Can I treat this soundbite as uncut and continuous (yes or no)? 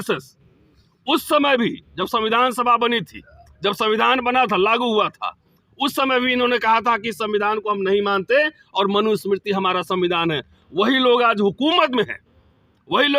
yes